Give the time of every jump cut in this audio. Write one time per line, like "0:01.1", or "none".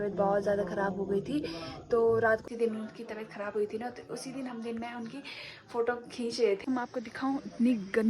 0:02.4
0:06.6